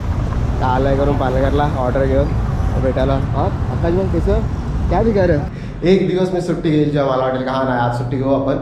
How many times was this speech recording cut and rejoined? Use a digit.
1